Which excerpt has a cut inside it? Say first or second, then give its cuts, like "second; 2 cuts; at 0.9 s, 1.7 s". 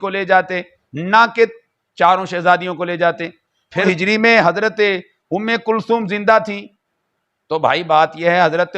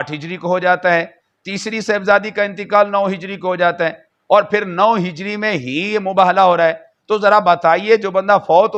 first; 1 cut; at 3.9 s